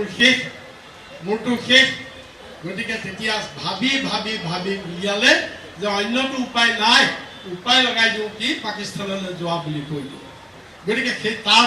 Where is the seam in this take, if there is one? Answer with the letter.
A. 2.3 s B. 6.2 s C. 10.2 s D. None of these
D